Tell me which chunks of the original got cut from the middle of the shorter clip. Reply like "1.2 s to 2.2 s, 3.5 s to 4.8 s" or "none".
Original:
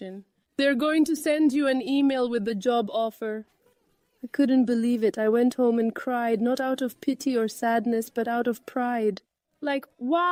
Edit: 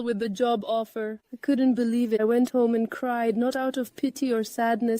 3.5 s to 4.2 s, 5.1 s to 5.2 s